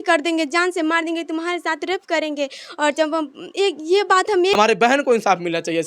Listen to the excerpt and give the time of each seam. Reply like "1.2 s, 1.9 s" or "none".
4.6 s

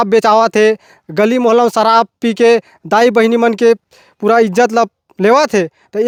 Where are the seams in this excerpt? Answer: none

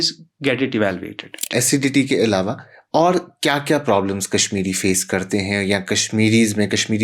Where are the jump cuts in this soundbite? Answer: 1.4 s

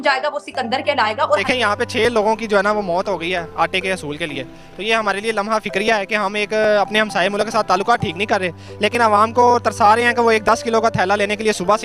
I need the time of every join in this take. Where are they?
1.5 s

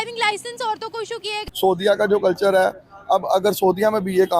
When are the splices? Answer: 1.4 s

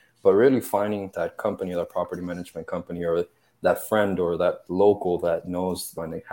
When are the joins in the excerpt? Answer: 1.1 s

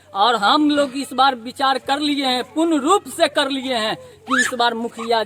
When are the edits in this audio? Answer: none

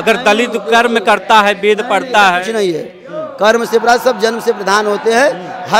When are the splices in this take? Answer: none

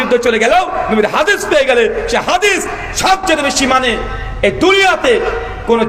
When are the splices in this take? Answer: none

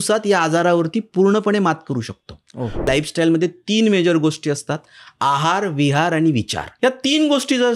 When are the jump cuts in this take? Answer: 2.9 s, 6.6 s

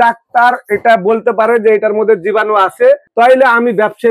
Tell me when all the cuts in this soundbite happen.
3.1 s

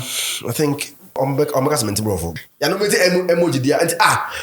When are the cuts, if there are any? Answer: 1.2 s, 2.3 s

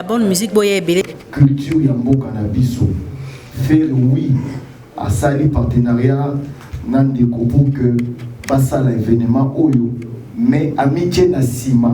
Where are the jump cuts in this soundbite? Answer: 1.1 s

